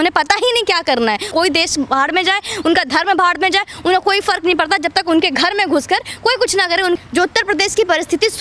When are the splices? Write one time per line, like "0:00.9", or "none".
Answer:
0:01.3
0:07.0